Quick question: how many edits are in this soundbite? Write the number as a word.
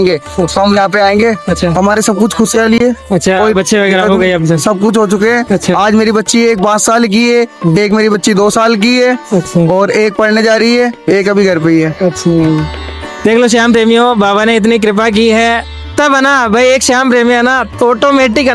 zero